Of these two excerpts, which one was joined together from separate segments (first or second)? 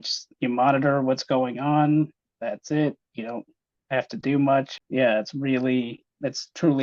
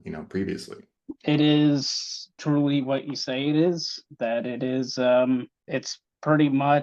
first